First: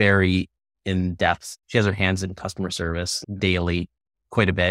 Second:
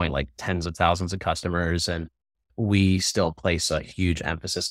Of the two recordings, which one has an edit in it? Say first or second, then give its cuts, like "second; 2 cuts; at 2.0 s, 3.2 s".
first; 2 cuts; at 1.5 s, 3.2 s